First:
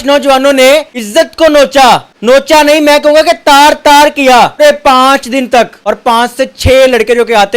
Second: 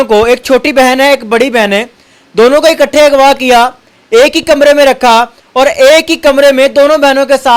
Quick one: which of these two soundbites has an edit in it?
first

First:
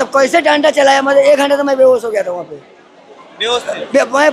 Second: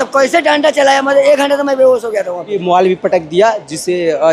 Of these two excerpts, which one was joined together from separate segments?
second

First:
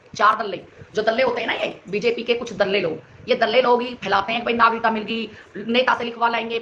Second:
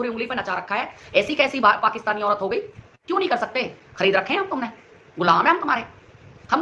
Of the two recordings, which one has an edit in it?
second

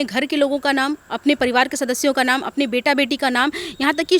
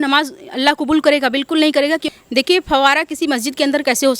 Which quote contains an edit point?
second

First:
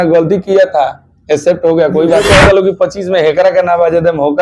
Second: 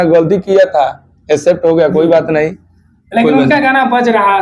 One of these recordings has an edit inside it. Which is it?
first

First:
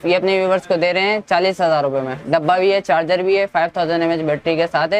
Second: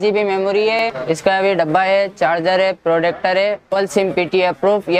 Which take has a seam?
second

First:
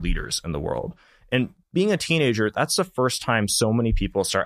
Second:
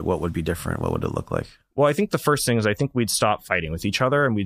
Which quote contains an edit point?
first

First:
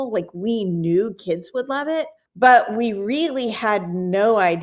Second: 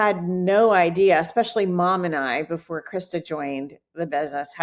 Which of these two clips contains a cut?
first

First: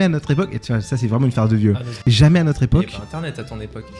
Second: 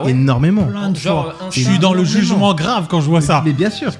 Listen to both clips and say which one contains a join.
first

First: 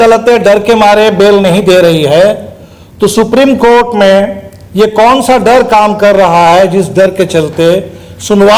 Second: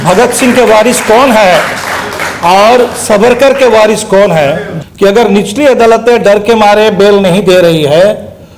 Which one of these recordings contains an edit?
second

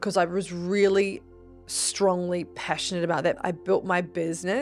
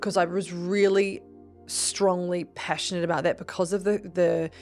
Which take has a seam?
first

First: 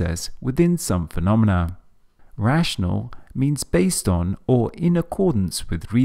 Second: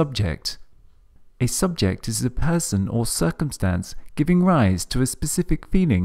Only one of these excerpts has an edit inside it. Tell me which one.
second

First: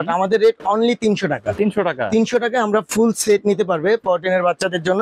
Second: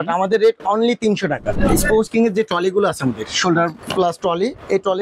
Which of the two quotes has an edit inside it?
second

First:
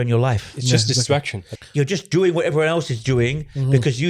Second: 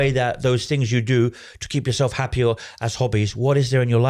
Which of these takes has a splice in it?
first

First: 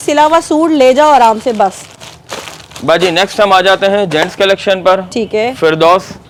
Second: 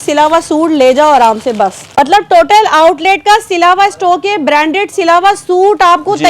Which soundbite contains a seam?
second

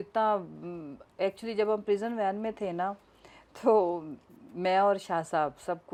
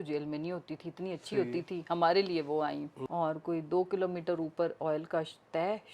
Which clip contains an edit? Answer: second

